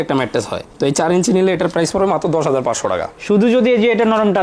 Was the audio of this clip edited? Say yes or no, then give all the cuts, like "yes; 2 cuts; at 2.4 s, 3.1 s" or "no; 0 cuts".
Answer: no; 0 cuts